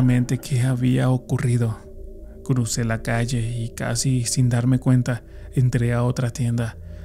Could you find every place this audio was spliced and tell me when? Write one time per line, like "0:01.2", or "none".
none